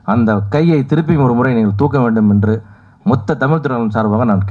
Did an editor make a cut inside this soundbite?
no; 0 cuts

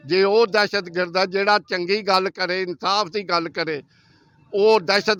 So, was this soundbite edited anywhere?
no; 0 cuts

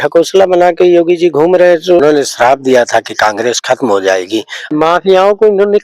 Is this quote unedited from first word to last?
no; 2 cuts; at 2.0 s, 4.6 s

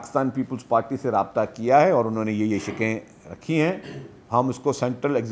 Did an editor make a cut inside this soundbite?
no; 0 cuts

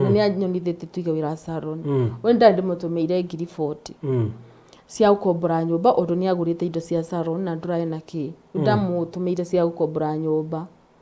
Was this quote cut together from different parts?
no; 0 cuts

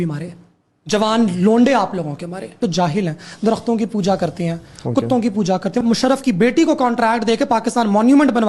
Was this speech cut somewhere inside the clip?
yes; 2 cuts; at 2.6 s, 5.8 s

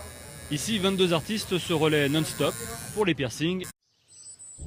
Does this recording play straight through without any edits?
yes; 0 cuts

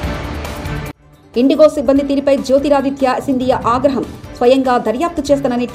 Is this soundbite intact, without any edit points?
yes; 0 cuts

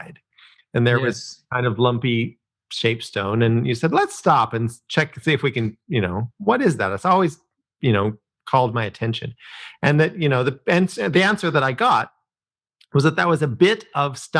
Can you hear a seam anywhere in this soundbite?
no; 0 cuts

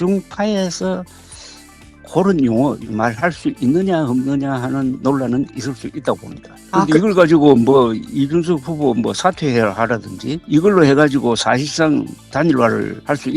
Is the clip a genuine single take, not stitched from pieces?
no; 2 cuts; at 2.8 s, 10.4 s

